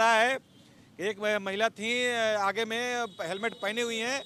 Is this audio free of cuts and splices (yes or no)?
yes